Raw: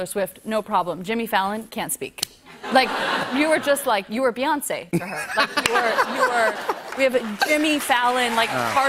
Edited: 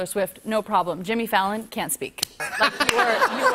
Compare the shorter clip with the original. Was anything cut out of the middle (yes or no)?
yes